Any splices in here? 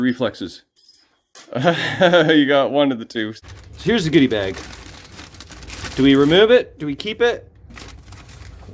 yes; 1 cut; at 3.3 s

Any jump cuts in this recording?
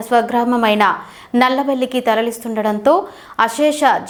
no; 0 cuts

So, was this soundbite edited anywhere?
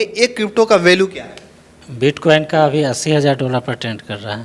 no; 0 cuts

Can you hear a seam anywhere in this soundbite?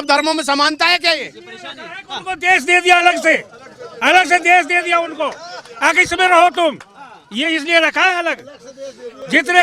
no; 0 cuts

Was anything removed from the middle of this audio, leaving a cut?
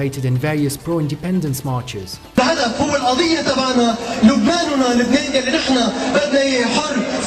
yes; 1 cut; at 3.0 s

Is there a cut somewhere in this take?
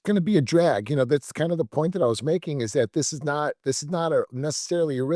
no; 0 cuts

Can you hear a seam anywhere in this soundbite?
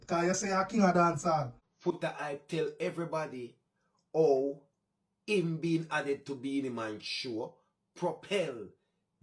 yes; 1 cut; at 1.7 s

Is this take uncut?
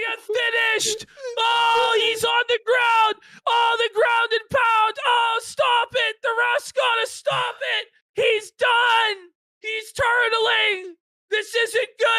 yes; 0 cuts

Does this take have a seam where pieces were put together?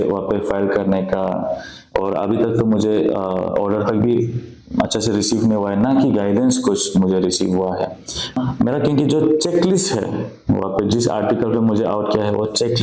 yes; 1 cut; at 8.4 s

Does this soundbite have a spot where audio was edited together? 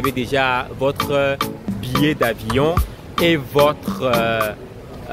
no; 0 cuts

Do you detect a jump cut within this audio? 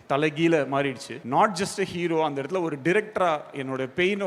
yes; 1 cut; at 1.1 s

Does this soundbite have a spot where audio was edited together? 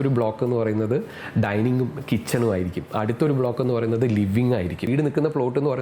yes; 1 cut; at 4.9 s

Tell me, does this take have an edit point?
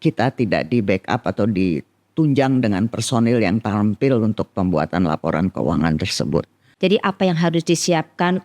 yes; 1 cut; at 6.6 s

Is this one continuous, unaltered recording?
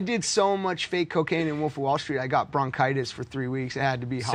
yes; 0 cuts

